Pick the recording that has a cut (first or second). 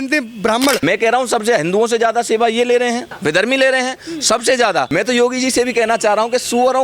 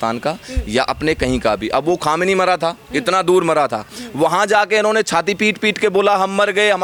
first